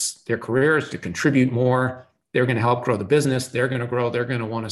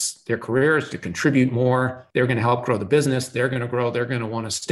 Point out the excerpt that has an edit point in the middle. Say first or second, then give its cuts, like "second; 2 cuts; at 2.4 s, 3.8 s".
second; 1 cut; at 2.0 s